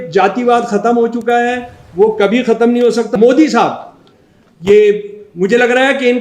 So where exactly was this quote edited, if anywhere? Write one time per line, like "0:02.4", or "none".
0:03.1